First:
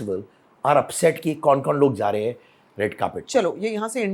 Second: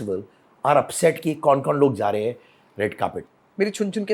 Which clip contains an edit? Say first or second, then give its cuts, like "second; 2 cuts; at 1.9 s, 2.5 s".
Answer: second; 1 cut; at 3.2 s